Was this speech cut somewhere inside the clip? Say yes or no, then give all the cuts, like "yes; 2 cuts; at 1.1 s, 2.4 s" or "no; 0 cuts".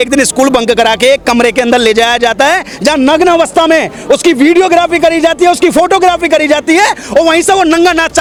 no; 0 cuts